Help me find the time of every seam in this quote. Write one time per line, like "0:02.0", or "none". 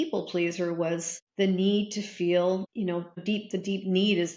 0:01.2
0:03.2